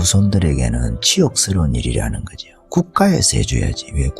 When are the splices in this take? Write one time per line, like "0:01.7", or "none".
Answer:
none